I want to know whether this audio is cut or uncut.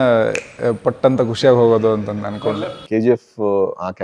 cut